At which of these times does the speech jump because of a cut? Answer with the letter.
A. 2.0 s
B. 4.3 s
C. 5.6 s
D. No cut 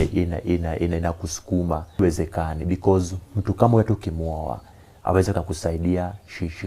A